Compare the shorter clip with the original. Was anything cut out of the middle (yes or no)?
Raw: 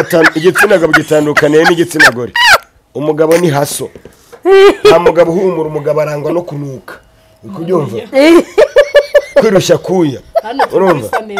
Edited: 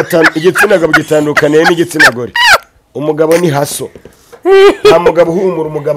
no